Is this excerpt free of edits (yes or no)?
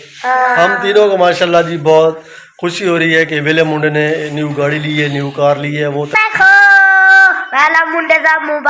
no